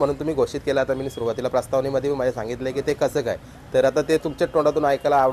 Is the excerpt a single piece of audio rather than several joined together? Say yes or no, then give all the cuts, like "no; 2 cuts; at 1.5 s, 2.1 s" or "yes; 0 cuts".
yes; 0 cuts